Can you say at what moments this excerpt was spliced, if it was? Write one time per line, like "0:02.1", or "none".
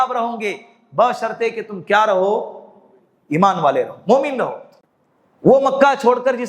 0:04.7